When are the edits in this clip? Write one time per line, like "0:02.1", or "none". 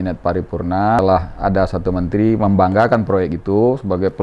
0:01.0